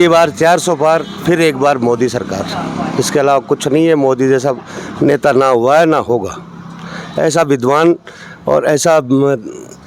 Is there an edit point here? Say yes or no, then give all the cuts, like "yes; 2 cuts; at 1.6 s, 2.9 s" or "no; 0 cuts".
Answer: no; 0 cuts